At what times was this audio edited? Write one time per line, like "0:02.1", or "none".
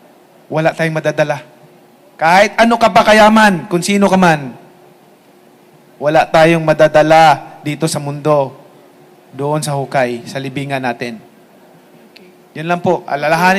none